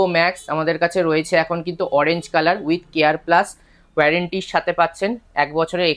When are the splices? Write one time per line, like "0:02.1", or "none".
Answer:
none